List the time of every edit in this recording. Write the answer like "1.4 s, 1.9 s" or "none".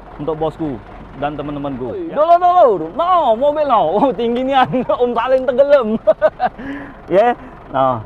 2.1 s